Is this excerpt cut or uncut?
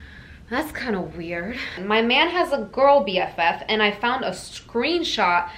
cut